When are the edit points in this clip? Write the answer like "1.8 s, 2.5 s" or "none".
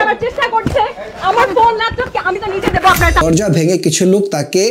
3.2 s